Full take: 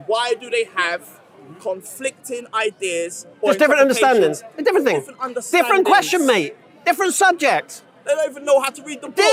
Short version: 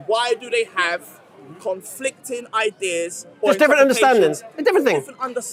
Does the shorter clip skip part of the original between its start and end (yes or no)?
no